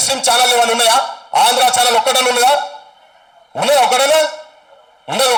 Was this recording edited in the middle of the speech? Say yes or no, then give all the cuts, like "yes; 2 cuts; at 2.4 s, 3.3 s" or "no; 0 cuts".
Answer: no; 0 cuts